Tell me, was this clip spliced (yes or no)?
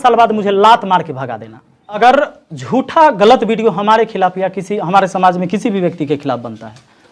yes